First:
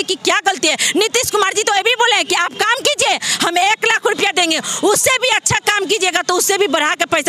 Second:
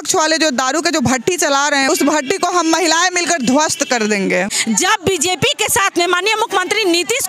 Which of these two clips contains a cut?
second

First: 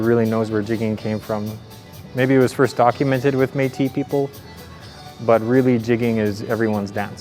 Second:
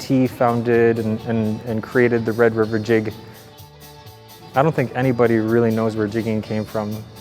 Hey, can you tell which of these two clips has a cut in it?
second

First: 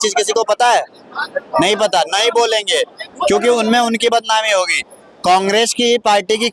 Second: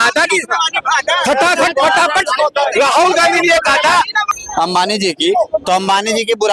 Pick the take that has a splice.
second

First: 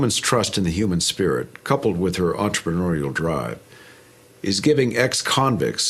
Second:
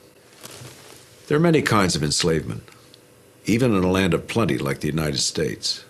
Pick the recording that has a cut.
second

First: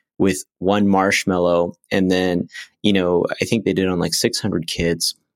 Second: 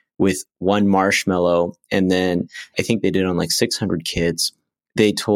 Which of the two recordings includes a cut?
second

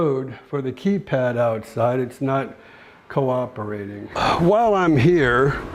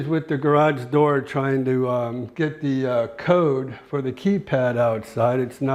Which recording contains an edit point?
first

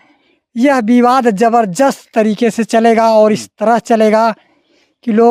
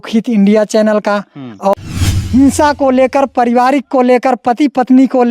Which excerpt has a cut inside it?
second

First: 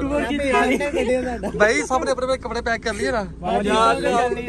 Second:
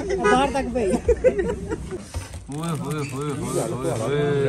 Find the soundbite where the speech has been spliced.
second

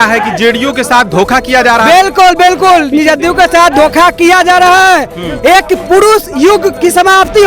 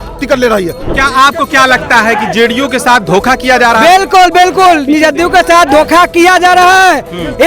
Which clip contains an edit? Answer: second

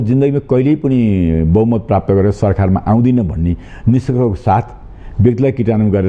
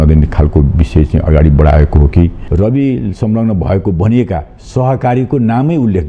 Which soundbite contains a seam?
second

